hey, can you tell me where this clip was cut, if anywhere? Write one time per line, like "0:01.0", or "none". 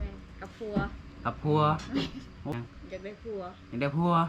0:02.5